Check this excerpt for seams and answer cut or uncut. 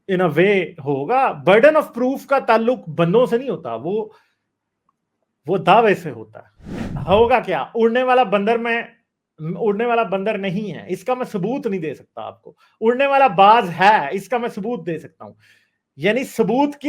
cut